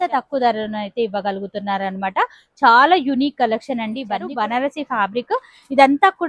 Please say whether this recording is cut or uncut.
cut